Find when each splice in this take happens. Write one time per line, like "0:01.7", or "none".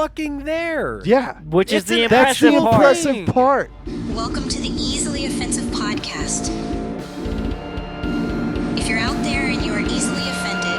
0:03.8